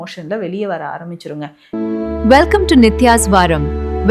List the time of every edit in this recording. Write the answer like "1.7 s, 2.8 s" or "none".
1.6 s

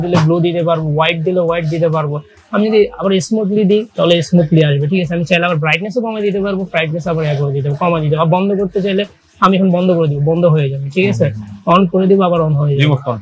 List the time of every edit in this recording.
none

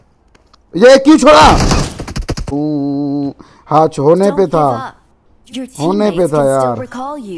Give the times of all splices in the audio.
2.5 s

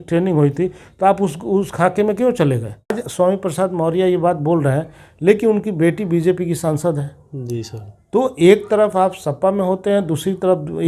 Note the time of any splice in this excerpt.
3.0 s

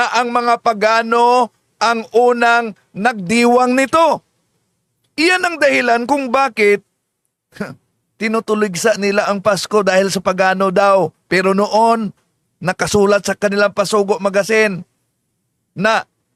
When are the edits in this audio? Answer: none

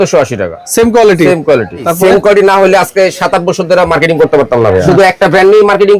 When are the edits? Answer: 1.9 s, 4.9 s

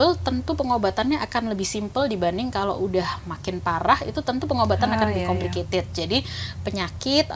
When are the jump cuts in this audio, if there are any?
none

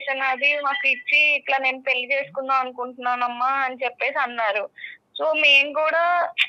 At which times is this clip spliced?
none

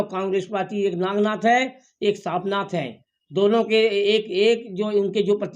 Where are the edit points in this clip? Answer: none

